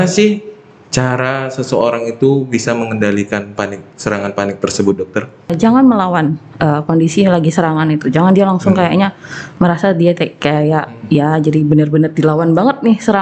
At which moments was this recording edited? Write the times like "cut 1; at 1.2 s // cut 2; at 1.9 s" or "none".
cut 1; at 5.5 s